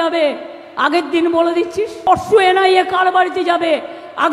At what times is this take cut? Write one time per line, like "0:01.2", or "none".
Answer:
0:02.0